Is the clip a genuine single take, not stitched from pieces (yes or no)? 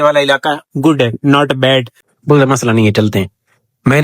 no